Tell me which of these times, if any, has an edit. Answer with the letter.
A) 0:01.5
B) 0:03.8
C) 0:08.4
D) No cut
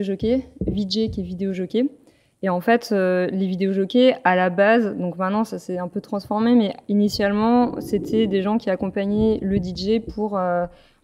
D